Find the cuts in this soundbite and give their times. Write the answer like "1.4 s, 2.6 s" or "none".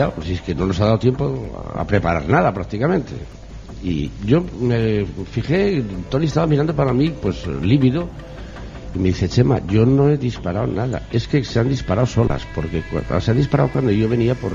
none